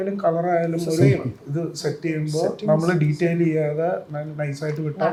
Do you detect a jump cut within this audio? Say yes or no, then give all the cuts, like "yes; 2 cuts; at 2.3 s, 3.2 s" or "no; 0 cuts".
no; 0 cuts